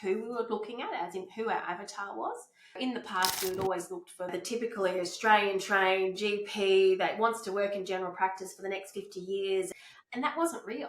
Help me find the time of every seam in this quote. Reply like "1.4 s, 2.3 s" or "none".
2.8 s, 4.3 s, 9.7 s